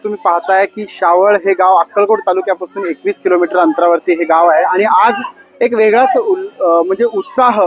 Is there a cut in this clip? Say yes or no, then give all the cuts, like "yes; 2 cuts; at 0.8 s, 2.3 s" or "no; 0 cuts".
no; 0 cuts